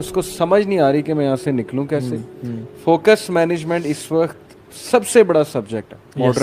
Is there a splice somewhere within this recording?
no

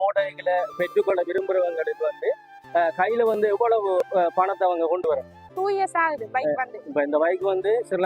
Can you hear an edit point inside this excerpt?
yes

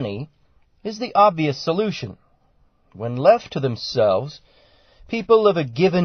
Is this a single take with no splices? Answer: no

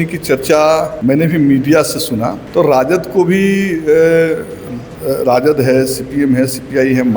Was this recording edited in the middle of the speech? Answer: yes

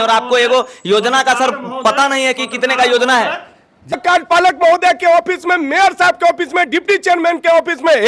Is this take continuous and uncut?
no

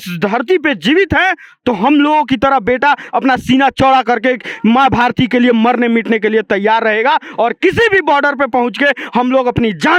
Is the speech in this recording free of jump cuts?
yes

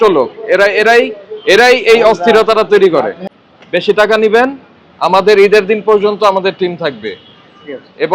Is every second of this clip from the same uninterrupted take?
no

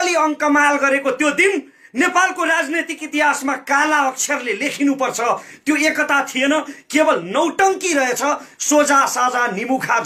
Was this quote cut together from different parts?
no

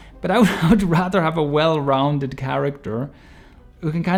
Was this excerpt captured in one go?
yes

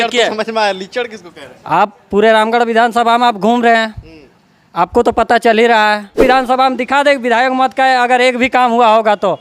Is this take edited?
yes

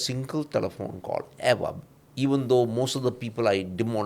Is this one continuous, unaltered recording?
yes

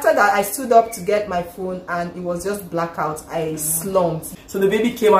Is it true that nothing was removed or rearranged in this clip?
no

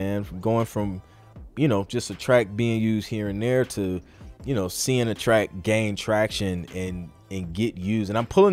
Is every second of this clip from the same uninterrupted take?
yes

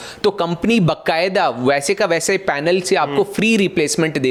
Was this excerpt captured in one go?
yes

